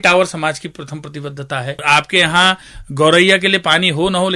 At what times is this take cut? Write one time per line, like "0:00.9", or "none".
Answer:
0:01.8